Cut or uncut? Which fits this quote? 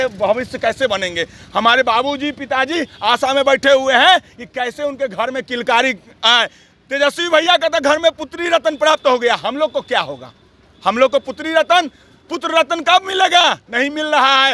uncut